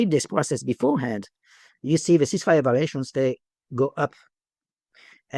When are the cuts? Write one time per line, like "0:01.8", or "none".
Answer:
none